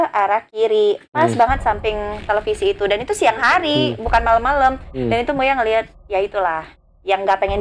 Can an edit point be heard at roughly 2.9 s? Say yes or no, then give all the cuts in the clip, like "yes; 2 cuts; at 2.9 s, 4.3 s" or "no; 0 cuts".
no; 0 cuts